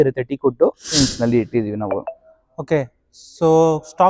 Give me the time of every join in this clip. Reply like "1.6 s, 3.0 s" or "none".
1.0 s